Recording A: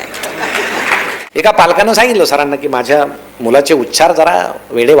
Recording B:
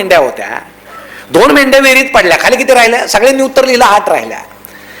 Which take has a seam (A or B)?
A